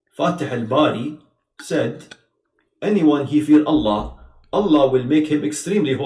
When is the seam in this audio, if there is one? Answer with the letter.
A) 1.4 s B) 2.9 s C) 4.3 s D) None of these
D